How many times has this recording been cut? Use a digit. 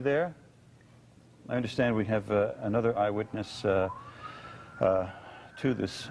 1